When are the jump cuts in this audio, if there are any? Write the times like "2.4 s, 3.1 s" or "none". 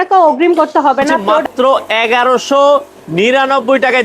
1.1 s